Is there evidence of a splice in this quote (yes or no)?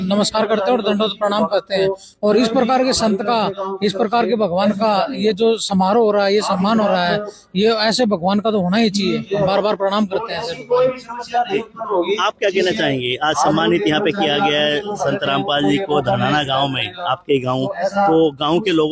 no